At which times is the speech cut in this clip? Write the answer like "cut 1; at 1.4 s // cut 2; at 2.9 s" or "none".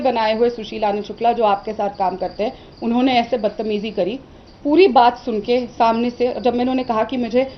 none